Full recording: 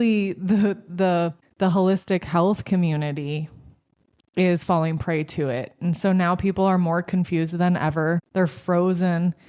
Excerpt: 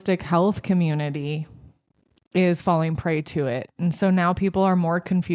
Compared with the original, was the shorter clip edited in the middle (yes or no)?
no